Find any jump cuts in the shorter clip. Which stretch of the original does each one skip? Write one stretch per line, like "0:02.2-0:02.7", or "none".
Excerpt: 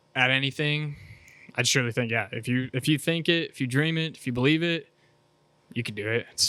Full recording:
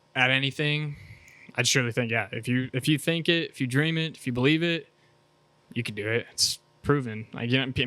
none